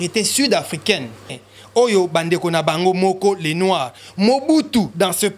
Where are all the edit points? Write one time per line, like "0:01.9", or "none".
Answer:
0:01.5